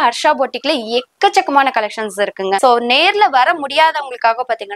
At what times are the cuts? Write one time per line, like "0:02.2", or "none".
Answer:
0:02.6